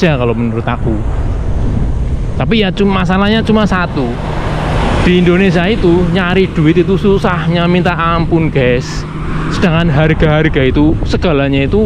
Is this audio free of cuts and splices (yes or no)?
yes